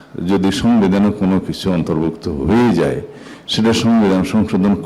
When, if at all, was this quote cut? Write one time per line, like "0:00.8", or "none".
none